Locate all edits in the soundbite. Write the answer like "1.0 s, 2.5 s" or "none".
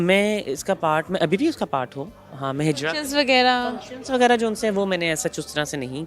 none